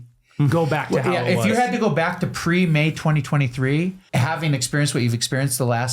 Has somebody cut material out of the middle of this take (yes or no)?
yes